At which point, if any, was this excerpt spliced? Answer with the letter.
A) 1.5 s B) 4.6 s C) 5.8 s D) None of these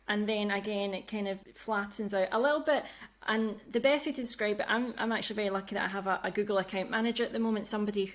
A